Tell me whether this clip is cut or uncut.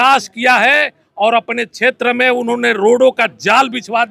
uncut